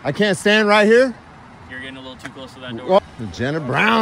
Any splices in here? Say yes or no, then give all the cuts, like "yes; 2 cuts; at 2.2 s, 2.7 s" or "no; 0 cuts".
yes; 1 cut; at 3.0 s